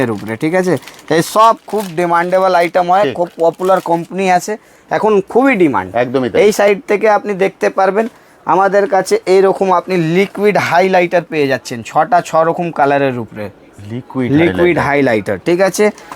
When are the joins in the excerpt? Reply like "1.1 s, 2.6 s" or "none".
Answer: none